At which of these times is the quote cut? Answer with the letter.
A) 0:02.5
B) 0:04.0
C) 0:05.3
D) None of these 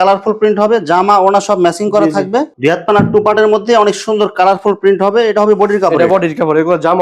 A